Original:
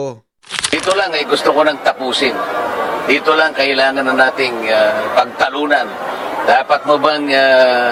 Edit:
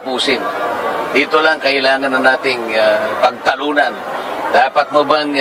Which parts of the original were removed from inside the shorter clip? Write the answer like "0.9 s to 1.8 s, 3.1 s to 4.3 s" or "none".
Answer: none

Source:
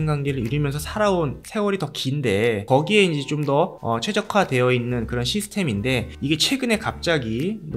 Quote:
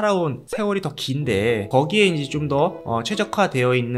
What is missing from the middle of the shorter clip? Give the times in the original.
none

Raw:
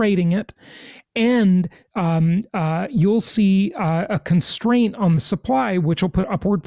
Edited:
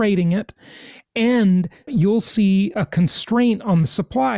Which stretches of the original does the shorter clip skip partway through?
1.8 s to 2.8 s, 3.7 s to 4.1 s

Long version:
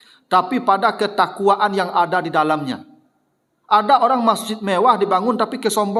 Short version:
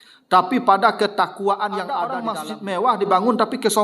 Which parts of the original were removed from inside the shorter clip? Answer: 2.2 s to 4.2 s

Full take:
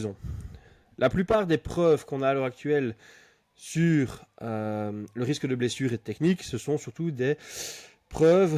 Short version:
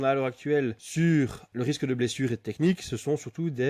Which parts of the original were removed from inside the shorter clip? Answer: 3.0 s to 3.6 s, 4.2 s to 5.0 s

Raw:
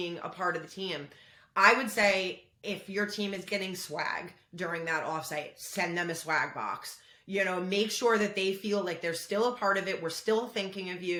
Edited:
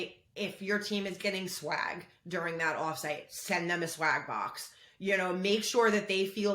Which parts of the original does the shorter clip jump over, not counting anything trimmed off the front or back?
none

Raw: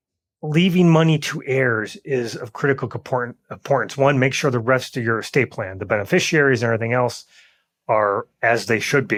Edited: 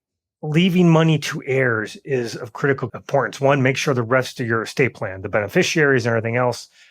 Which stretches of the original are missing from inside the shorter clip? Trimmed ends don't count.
2.9 s to 3.5 s

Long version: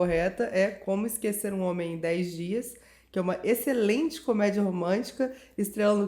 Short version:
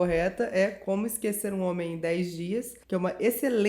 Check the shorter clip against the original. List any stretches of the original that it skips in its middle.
2.8 s to 3.0 s

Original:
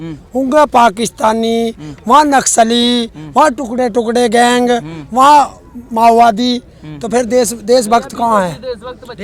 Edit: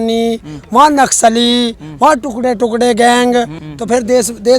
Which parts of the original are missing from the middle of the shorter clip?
5.0 s to 6.8 s

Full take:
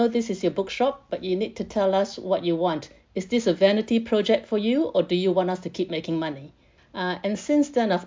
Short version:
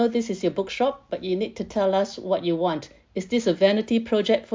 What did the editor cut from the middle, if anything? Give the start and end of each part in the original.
none

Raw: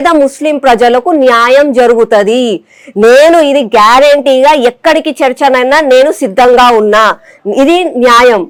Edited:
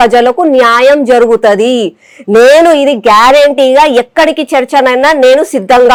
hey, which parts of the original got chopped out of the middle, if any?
none

